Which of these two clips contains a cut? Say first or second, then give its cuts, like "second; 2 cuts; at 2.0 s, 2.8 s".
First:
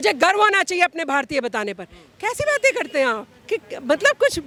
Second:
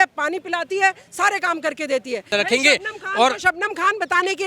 second; 1 cut; at 2.3 s